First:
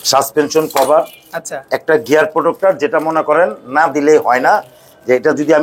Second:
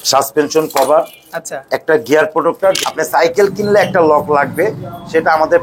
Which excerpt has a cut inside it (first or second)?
second